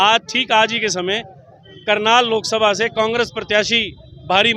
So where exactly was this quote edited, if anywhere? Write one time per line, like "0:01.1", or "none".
none